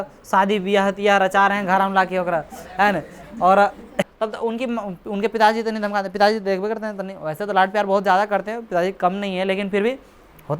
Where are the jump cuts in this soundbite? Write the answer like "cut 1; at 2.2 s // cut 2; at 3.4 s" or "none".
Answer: cut 1; at 4.1 s